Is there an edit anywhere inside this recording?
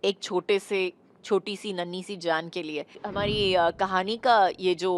yes; 1 cut; at 3.0 s

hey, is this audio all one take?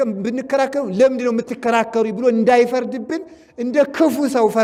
yes; 0 cuts

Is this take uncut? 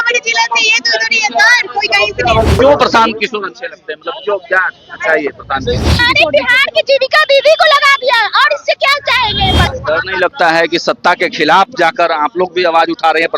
no; 3 cuts; at 2.5 s, 6.0 s, 9.7 s

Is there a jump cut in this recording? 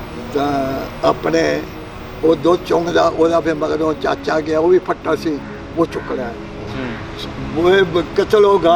yes; 1 cut; at 6.5 s

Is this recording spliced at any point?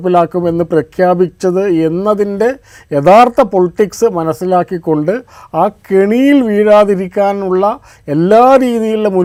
no; 0 cuts

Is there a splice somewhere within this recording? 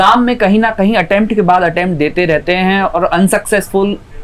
no; 0 cuts

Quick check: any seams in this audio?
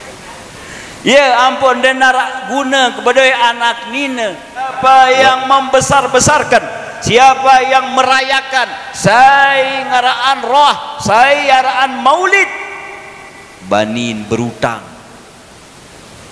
yes; 1 cut; at 4.7 s

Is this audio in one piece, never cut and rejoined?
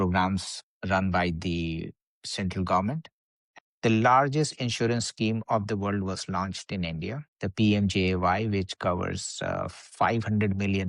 no; 1 cut; at 3.3 s

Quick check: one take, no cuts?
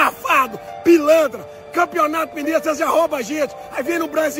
yes; 0 cuts

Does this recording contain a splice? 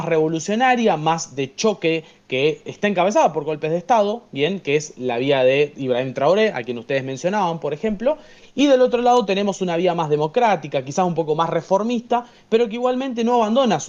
no; 0 cuts

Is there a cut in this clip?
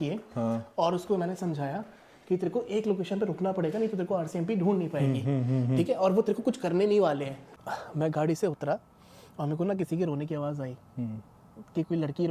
yes; 1 cut; at 7.4 s

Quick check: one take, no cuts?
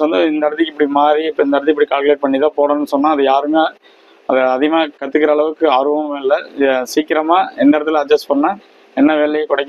yes; 0 cuts

